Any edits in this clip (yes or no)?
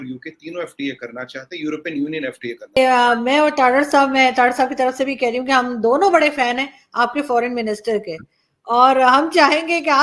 yes